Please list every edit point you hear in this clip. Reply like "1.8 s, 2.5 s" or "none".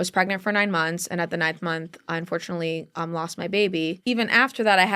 4.0 s